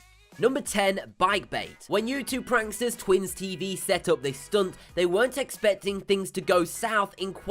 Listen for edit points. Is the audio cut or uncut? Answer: cut